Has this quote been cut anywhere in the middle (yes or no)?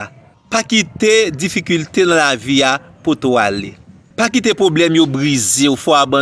no